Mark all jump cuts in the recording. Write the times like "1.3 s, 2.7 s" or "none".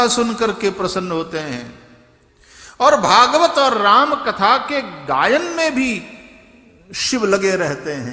none